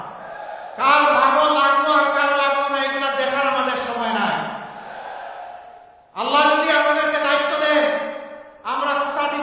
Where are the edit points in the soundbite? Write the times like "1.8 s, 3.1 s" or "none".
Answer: 4.2 s